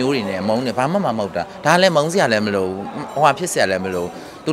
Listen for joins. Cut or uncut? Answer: uncut